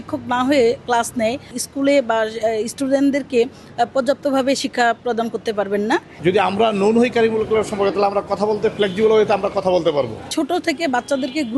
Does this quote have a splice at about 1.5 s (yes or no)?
yes